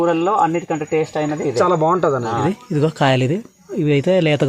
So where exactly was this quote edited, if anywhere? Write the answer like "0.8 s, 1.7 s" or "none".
2.9 s